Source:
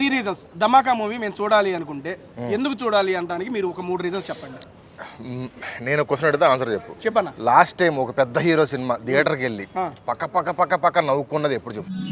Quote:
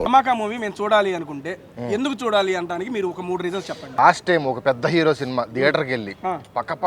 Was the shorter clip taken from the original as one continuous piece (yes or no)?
no